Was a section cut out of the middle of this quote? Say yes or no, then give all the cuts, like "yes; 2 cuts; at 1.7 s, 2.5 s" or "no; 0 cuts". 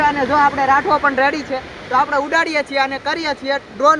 no; 0 cuts